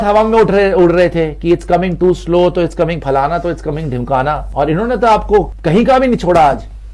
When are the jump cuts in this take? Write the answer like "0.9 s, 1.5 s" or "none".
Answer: 4.4 s, 5.6 s